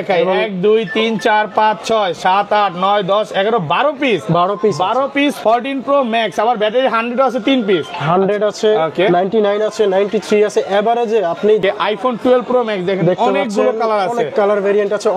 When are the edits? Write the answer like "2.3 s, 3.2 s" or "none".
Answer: 11.6 s

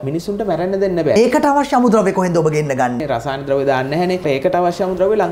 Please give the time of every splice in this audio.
1.2 s, 3.0 s, 4.2 s

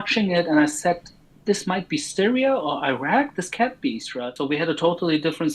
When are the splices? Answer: 4.3 s

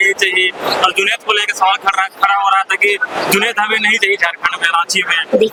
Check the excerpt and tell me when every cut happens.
none

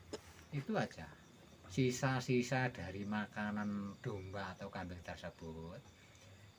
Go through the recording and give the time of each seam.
none

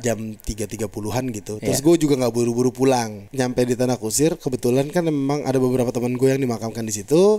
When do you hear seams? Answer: 3.2 s

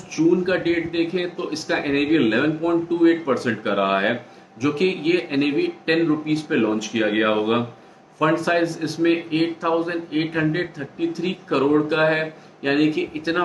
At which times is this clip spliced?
none

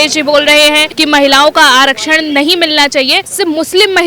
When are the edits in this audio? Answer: 0.9 s, 3.3 s

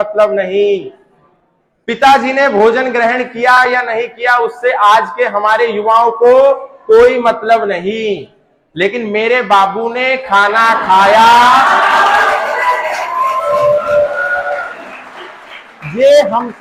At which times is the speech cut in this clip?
none

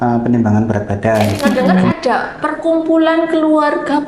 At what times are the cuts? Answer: 1.9 s

